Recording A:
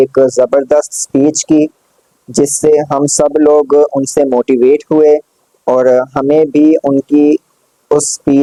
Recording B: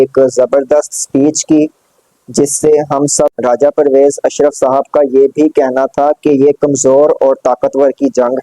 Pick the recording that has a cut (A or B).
B